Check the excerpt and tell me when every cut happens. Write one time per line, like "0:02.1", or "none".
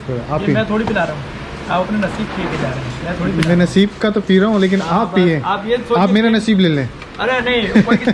none